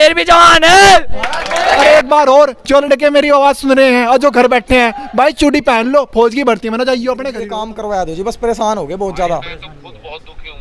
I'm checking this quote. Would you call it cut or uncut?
cut